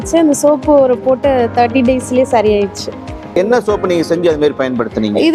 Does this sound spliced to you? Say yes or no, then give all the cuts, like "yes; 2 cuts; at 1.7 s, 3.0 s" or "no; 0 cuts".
yes; 1 cut; at 3.4 s